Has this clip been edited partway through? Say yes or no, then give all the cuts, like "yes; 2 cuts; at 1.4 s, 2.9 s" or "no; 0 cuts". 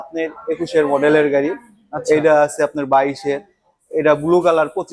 no; 0 cuts